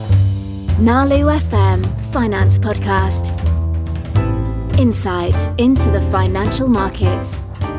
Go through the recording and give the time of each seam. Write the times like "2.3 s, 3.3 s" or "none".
none